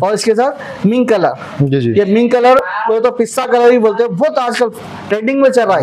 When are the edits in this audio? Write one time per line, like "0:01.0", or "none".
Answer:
none